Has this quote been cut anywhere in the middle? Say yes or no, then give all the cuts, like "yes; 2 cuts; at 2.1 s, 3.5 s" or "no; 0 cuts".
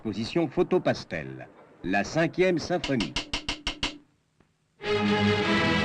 yes; 1 cut; at 2.5 s